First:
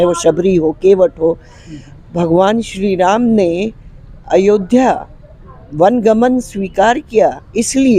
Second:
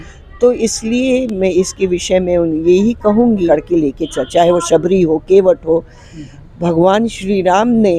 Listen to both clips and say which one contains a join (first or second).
second